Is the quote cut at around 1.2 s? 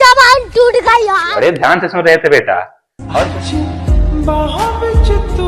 yes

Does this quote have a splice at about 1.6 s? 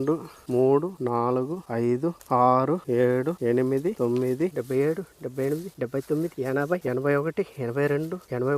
no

